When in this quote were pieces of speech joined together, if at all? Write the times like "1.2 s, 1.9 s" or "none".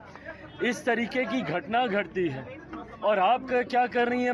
none